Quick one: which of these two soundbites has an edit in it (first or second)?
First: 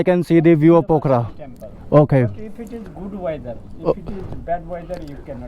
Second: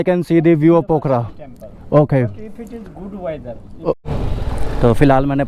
second